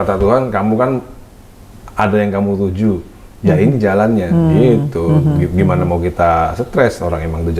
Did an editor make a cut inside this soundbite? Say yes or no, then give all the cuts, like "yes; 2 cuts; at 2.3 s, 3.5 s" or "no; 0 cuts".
no; 0 cuts